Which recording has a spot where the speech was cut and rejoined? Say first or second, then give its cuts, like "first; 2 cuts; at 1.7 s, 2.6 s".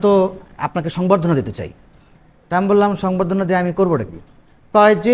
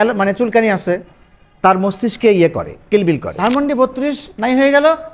second; 1 cut; at 3.3 s